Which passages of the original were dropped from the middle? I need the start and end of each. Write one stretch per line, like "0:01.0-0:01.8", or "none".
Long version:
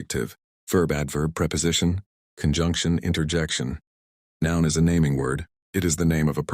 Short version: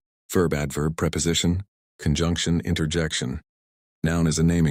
none